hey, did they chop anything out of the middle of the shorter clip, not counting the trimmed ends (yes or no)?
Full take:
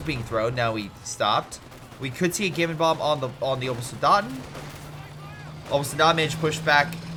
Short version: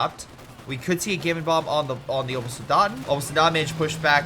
yes